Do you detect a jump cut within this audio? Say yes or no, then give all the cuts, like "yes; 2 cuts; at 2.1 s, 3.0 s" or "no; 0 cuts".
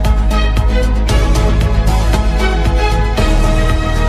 no; 0 cuts